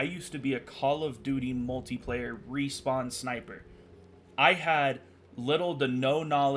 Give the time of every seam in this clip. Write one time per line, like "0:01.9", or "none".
none